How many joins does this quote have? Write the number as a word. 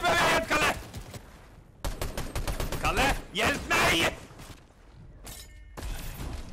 two